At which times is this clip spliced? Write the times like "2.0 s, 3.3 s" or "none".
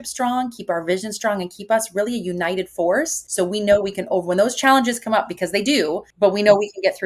3.2 s, 6.0 s